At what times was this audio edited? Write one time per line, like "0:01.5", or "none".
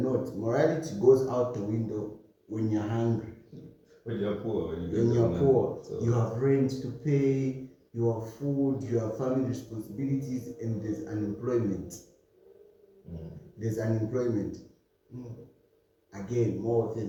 none